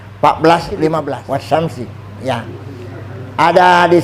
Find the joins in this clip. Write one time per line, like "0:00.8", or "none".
0:00.9